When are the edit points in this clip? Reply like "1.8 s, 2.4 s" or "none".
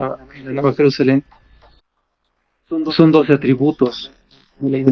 none